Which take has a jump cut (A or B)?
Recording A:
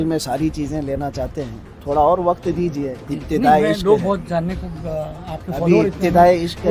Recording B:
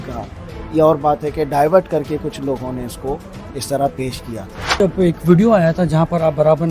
B